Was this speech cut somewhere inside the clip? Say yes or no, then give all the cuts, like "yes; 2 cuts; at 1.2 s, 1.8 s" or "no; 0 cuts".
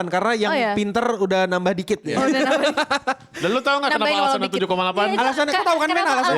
no; 0 cuts